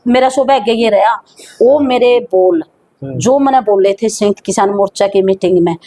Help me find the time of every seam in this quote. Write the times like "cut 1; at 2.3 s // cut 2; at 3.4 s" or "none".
none

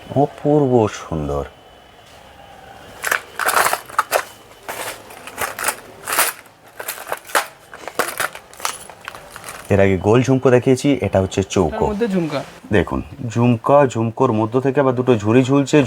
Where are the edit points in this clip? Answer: cut 1; at 12.0 s

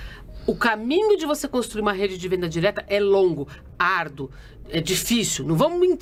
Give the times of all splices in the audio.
none

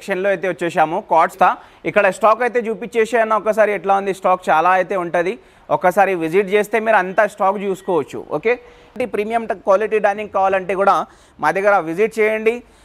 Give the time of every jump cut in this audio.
cut 1; at 1.3 s // cut 2; at 8.9 s

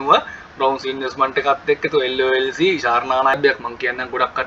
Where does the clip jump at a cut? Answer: cut 1; at 3.3 s

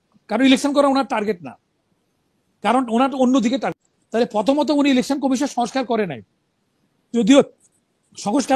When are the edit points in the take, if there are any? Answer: cut 1; at 3.8 s

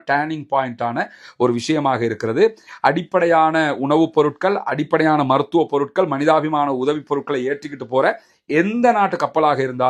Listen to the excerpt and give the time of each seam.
none

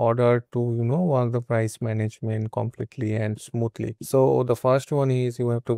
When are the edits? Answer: none

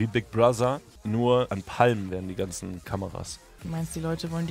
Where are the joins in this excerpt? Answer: cut 1; at 0.9 s // cut 2; at 1.6 s // cut 3; at 2.9 s

